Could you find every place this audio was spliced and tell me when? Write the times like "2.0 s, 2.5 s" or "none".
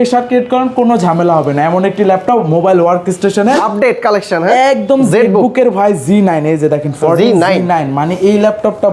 3.7 s

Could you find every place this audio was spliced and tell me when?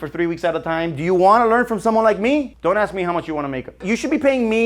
2.5 s, 3.8 s

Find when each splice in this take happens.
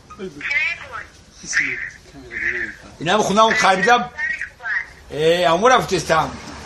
none

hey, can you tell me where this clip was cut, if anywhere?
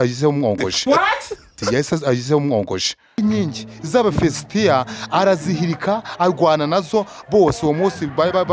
3.2 s

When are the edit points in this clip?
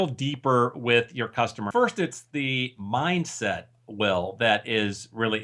1.7 s

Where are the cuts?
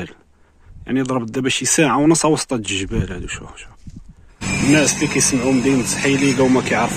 4.4 s

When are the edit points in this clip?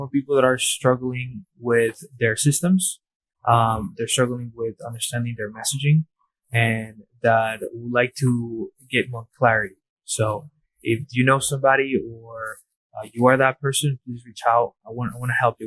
none

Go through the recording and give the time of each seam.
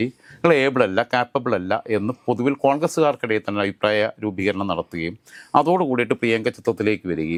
none

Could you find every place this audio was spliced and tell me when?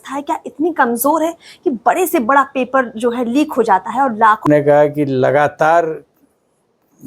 4.4 s

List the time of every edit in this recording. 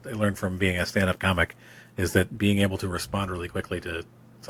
none

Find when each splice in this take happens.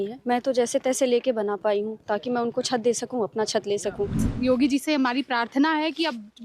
4.3 s

